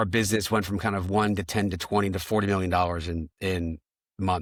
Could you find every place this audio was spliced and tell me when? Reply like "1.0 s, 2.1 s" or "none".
none